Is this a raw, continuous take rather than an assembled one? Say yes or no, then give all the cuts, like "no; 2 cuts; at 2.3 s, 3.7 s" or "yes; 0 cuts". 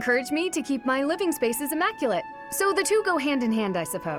yes; 0 cuts